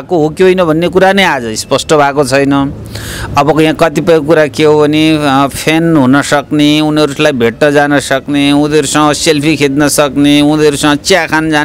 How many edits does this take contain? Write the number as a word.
zero